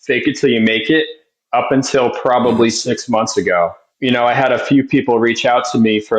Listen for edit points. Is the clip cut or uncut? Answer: cut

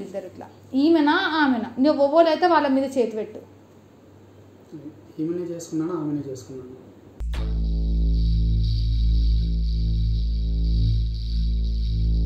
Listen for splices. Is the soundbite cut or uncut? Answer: uncut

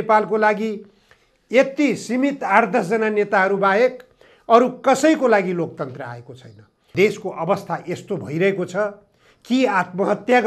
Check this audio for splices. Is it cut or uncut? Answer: cut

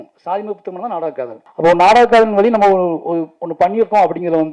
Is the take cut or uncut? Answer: cut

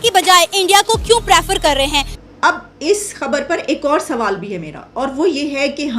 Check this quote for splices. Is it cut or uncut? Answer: cut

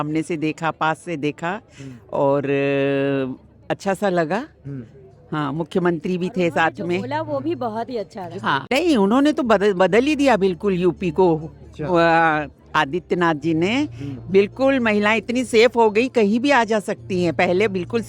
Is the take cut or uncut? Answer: cut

